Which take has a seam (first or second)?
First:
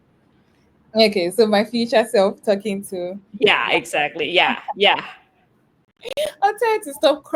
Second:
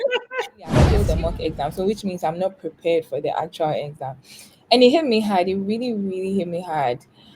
second